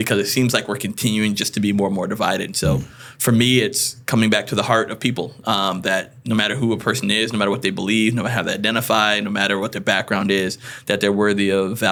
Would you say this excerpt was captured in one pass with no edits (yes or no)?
yes